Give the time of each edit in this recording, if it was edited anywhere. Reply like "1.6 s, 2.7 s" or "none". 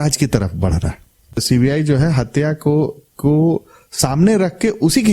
1.4 s